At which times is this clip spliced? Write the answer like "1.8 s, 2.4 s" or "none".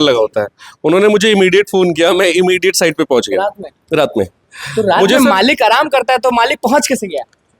none

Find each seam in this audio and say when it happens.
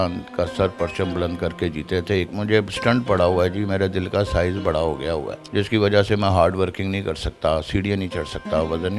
2.3 s

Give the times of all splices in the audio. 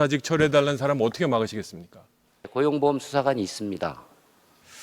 2.5 s

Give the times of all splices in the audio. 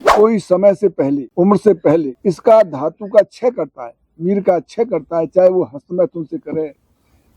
1.3 s, 2.1 s

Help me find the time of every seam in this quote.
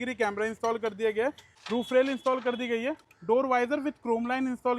1.5 s

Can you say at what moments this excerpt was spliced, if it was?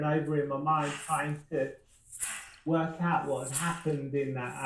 none

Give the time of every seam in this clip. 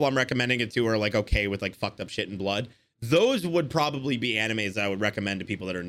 none

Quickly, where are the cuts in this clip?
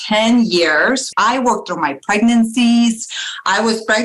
1.1 s

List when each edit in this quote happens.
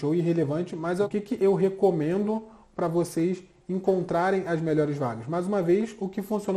1.1 s

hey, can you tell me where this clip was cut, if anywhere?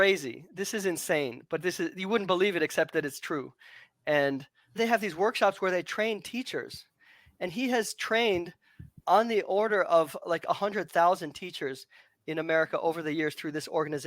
4.7 s

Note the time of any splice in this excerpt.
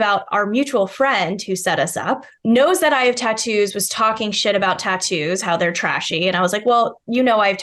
2.3 s

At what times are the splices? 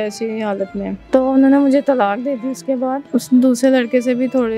1.0 s, 3.0 s

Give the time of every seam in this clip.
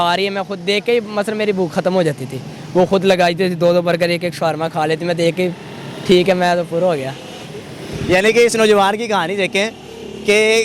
none

